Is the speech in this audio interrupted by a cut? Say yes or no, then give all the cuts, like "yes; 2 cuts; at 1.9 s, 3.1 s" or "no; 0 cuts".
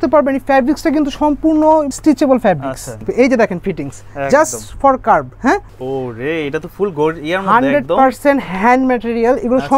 yes; 3 cuts; at 1.9 s, 3.0 s, 5.7 s